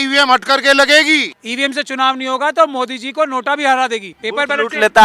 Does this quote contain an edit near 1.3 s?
yes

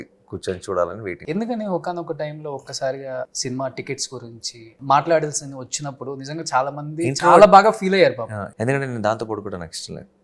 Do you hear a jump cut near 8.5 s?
yes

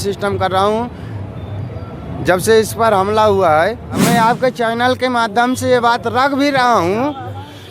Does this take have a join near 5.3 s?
no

